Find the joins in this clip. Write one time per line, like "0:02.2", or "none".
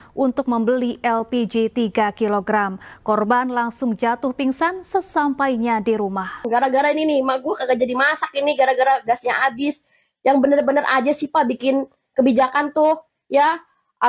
0:06.4